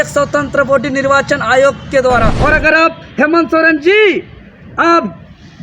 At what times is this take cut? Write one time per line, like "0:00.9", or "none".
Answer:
0:02.4